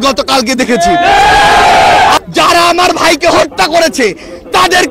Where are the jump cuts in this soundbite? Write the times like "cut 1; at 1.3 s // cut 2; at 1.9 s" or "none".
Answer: cut 1; at 2.2 s